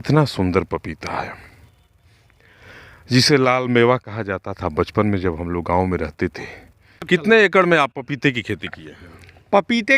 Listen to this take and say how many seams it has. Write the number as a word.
one